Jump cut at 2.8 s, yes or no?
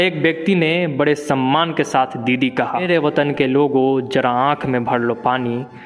yes